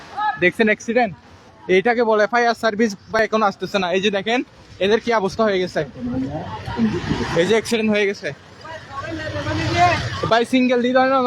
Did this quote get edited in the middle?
yes; 1 cut; at 3.2 s

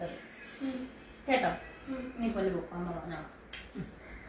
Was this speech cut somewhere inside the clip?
no; 0 cuts

